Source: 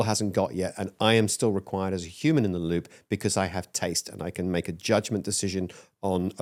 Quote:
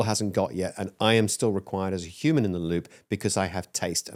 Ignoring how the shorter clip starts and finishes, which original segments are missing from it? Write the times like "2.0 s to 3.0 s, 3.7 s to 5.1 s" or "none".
none